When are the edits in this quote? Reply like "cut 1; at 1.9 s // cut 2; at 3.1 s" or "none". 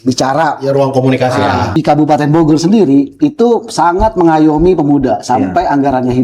cut 1; at 1.8 s